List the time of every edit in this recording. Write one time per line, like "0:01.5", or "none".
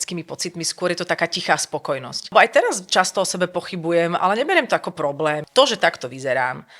0:02.3
0:05.4